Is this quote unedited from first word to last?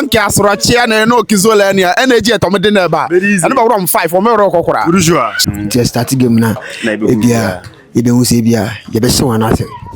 no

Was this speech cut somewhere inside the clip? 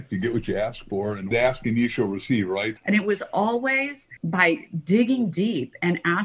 yes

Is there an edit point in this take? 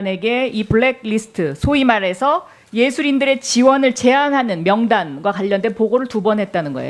no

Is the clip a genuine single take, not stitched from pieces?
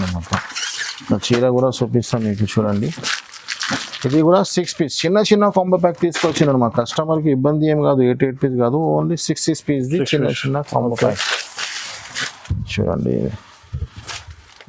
yes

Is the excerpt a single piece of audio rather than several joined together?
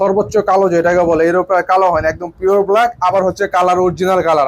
yes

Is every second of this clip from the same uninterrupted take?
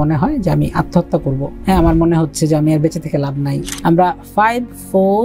no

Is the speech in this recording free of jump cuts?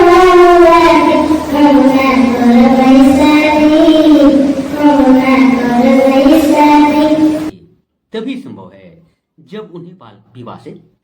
no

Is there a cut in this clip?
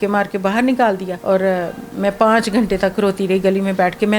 yes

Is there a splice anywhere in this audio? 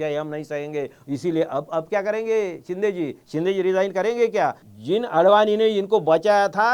yes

